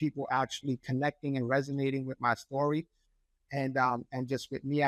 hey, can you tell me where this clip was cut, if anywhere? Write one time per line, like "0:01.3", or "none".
none